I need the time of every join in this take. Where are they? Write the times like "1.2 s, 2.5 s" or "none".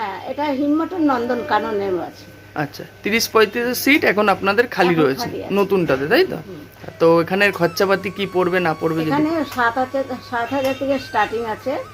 none